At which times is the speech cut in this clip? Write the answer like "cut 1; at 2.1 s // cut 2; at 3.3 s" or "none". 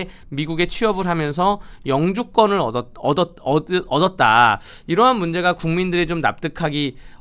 none